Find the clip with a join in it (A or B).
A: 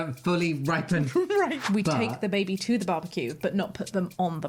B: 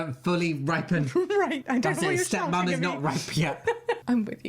A